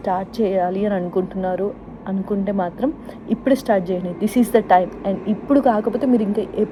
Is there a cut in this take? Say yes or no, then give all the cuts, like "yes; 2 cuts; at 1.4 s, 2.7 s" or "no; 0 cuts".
no; 0 cuts